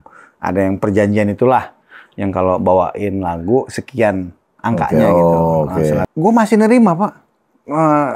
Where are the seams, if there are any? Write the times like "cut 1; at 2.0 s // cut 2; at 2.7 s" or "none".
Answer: cut 1; at 6.1 s